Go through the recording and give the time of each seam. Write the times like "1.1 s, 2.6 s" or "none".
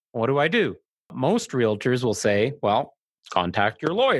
1.1 s